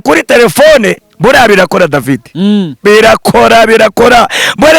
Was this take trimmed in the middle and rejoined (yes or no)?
yes